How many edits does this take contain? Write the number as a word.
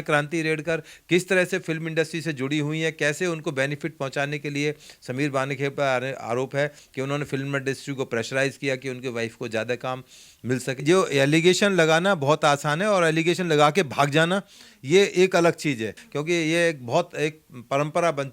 two